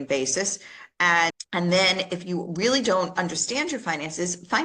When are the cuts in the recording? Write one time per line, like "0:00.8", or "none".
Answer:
0:01.3